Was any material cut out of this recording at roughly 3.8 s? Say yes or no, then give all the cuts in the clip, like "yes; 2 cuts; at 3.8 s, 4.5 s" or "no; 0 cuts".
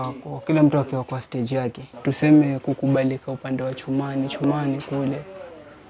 no; 1 cut; at 1.8 s